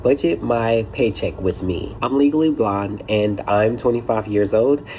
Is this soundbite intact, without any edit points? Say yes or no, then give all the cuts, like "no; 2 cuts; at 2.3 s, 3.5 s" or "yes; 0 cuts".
no; 1 cut; at 1.9 s